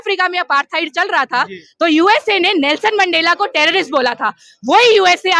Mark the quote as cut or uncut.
uncut